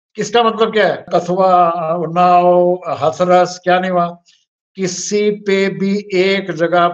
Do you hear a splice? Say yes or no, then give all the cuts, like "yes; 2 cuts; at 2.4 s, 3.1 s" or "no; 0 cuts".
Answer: yes; 1 cut; at 1.1 s